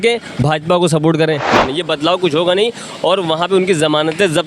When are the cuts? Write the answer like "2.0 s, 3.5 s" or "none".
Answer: 1.6 s

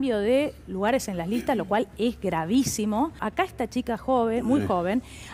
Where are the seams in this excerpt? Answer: 3.2 s

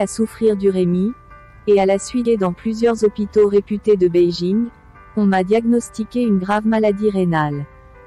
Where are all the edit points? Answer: 2.2 s

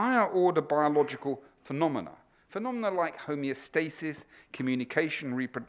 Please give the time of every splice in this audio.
3.2 s

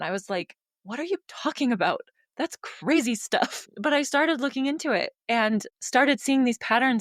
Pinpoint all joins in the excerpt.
3.7 s, 5.8 s

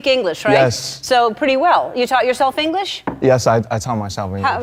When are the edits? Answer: none

